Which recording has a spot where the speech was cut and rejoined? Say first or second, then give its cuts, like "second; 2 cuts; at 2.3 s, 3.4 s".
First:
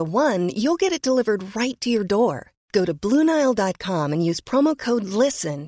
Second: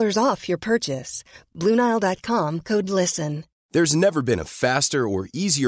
second; 1 cut; at 3.5 s